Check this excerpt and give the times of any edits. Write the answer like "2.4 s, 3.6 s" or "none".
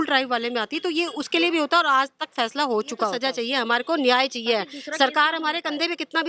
3.1 s